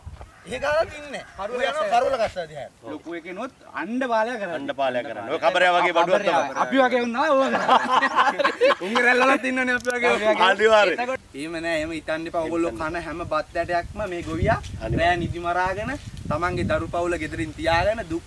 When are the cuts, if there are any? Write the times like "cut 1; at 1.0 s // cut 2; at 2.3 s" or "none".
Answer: cut 1; at 2.8 s // cut 2; at 11.2 s